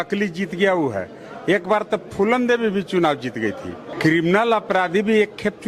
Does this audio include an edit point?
yes; 1 cut; at 3.9 s

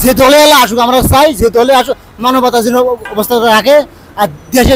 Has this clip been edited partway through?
yes; 1 cut; at 3.1 s

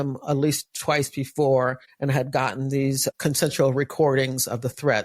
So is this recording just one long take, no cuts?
no; 2 cuts; at 1.9 s, 3.1 s

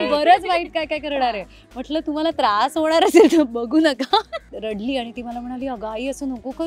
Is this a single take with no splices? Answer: no; 1 cut; at 4.5 s

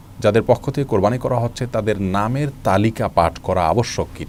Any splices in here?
no; 0 cuts

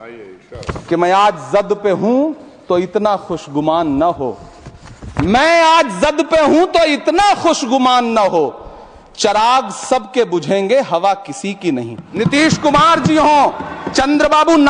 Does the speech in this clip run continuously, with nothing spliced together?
no; 1 cut; at 12.1 s

